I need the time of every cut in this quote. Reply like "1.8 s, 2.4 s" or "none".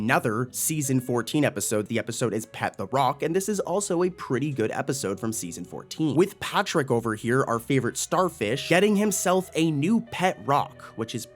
1.9 s

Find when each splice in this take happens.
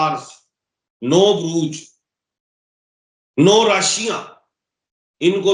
none

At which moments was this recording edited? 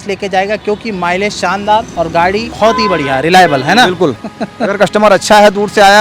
2.1 s, 4.3 s

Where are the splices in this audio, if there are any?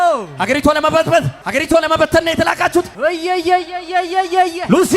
1.4 s, 2.9 s

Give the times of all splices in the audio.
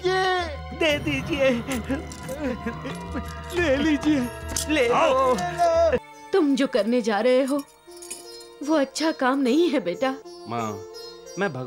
6.1 s, 10.3 s

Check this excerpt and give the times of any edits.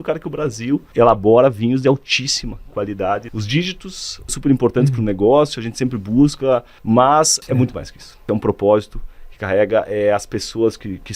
0.9 s, 3.3 s, 4.3 s, 6.7 s, 7.7 s

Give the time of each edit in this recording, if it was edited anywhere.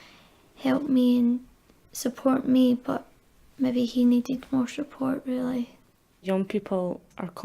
6.2 s

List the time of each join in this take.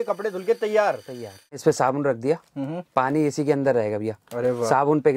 1.6 s

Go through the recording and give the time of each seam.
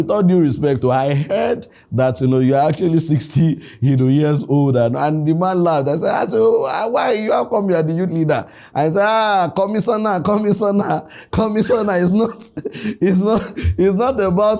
none

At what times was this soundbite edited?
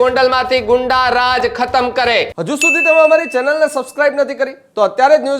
2.4 s

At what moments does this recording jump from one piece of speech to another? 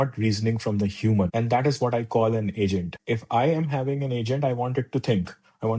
1.3 s, 2.9 s

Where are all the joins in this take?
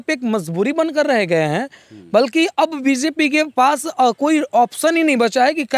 none

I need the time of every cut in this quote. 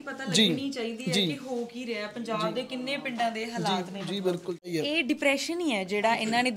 4.7 s

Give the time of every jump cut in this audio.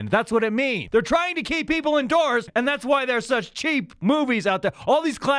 0.8 s, 2.5 s

